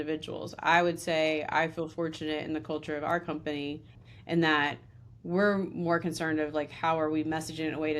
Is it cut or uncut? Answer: uncut